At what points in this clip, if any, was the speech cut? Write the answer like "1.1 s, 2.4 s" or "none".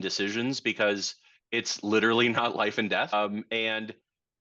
3.1 s